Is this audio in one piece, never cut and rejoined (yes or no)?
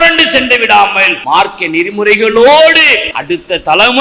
no